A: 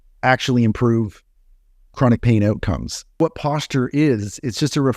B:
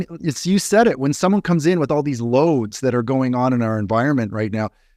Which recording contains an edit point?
A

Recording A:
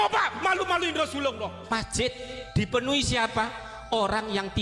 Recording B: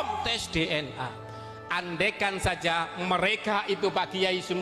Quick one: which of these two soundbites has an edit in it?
A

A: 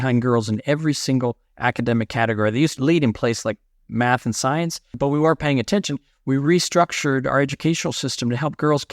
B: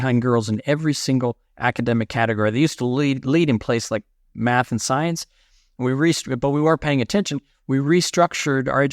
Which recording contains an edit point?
A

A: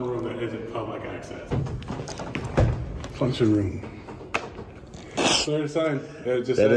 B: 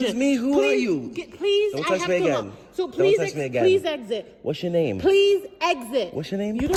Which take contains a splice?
A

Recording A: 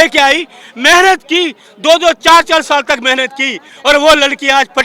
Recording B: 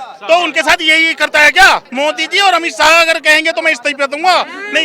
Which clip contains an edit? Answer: B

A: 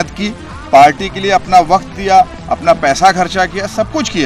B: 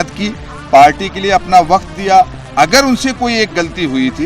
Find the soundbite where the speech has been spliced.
B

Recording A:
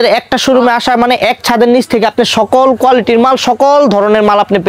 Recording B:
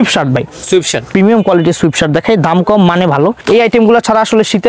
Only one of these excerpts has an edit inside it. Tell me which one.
B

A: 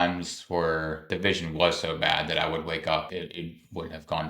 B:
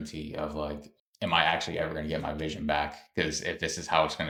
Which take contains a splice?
A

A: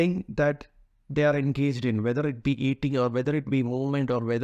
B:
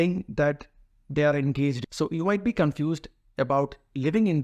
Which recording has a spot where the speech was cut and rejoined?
B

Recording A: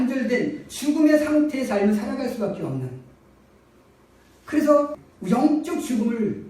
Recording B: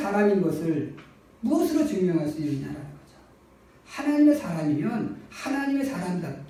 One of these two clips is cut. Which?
A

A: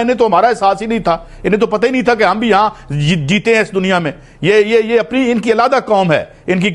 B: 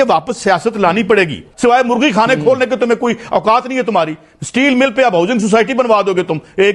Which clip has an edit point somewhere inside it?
B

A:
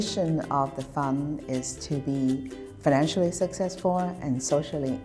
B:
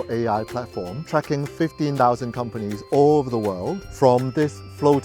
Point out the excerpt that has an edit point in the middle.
B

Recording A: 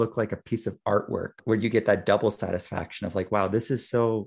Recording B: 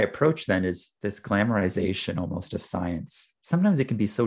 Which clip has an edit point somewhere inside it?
B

